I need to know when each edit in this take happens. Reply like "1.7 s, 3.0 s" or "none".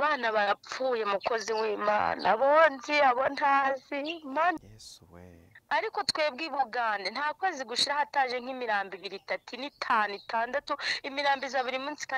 4.6 s